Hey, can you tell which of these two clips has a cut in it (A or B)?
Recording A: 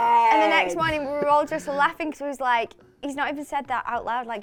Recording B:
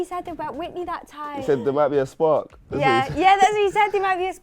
B